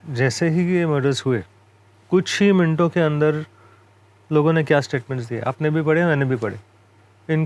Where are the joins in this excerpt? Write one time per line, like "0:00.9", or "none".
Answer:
none